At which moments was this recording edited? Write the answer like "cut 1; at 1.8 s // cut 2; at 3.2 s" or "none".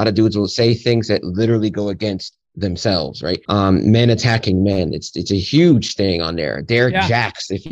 cut 1; at 3.4 s